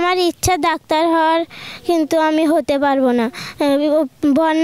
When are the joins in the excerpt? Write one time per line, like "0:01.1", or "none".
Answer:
none